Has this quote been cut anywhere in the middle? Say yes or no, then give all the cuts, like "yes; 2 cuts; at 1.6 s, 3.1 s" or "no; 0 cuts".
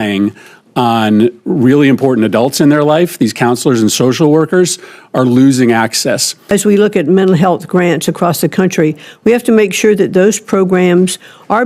yes; 1 cut; at 6.3 s